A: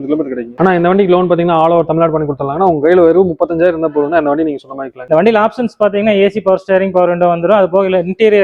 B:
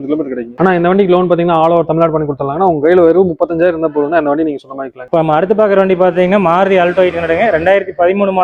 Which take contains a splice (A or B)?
A